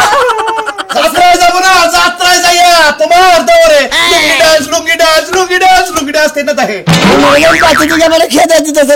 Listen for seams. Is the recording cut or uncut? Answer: cut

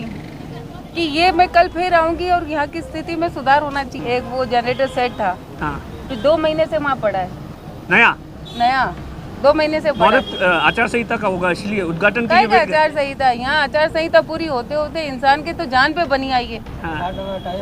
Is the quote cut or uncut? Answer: cut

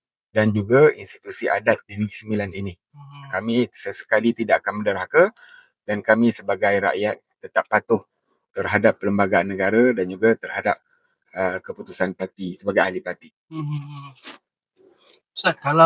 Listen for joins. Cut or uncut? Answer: uncut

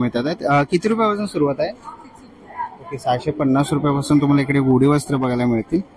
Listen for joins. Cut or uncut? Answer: uncut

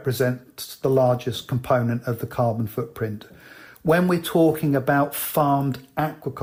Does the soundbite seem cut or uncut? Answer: uncut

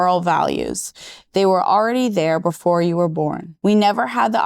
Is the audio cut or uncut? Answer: cut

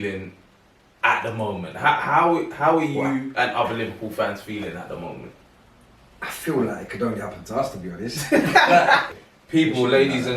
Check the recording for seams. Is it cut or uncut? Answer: cut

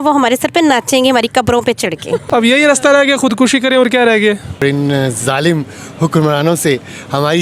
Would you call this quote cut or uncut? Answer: cut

